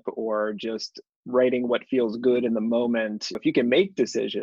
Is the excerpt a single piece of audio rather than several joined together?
no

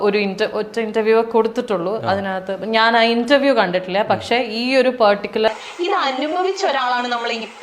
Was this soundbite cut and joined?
yes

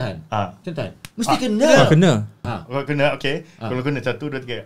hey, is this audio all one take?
no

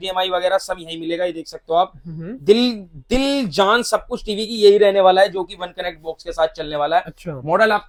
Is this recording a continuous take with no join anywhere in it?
yes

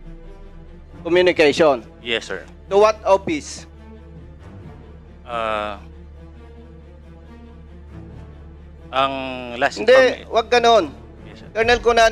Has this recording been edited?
no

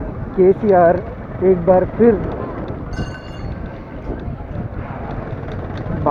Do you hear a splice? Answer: no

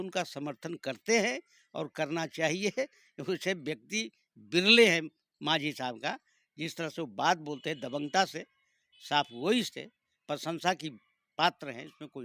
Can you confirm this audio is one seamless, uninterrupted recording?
yes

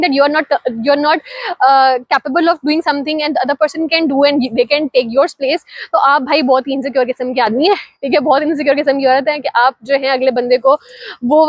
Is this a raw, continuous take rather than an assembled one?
yes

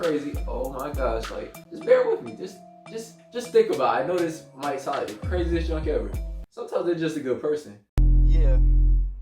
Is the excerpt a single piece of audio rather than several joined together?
no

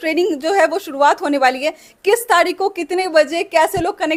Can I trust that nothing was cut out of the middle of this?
yes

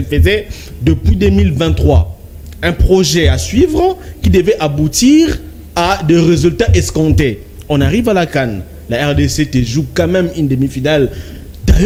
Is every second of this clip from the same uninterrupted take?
yes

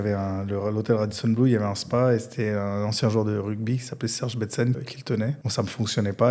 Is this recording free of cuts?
no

